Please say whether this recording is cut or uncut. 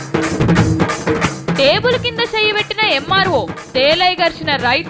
cut